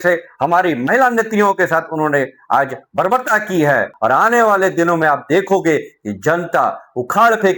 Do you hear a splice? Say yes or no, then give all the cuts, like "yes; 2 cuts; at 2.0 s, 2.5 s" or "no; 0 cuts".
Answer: yes; 1 cut; at 3.9 s